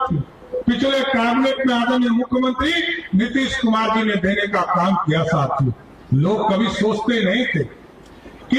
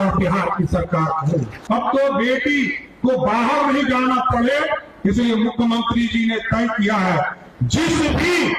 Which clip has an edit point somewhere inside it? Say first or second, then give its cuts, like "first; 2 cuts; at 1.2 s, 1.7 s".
second; 1 cut; at 1.6 s